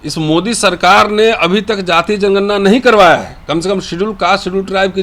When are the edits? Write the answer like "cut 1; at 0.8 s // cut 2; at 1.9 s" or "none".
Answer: none